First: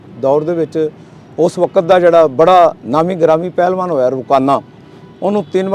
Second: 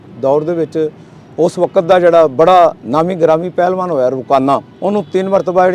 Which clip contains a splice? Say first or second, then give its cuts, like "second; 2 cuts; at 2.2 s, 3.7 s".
second; 1 cut; at 4.7 s